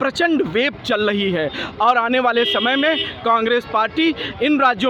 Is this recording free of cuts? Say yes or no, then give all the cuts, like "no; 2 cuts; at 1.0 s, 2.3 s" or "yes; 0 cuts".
yes; 0 cuts